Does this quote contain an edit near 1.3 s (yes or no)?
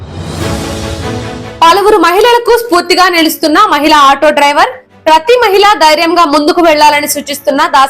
yes